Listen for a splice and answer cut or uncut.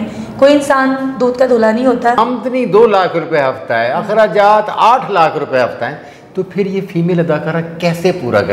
cut